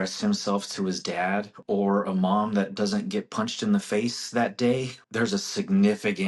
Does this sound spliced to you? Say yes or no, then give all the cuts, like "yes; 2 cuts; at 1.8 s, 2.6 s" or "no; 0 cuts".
yes; 2 cuts; at 1.6 s, 4.9 s